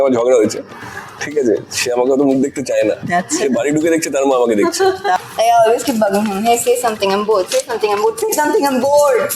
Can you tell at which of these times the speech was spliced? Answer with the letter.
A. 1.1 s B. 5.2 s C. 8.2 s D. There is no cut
B